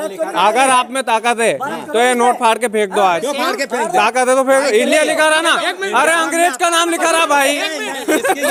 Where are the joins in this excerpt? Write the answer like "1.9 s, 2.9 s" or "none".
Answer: none

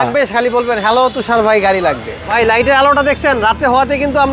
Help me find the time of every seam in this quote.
2.4 s

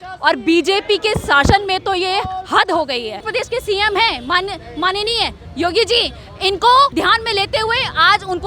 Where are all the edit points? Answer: 3.3 s, 6.9 s

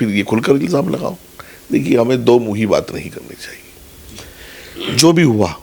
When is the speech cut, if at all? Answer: none

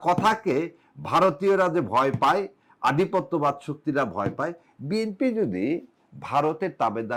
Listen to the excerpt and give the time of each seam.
none

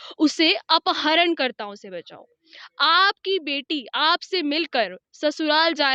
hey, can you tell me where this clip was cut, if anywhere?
none

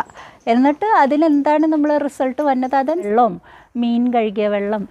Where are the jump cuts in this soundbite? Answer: 3.1 s

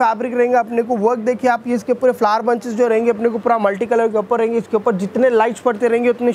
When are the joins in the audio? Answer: none

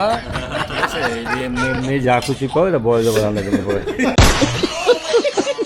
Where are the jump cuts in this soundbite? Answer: none

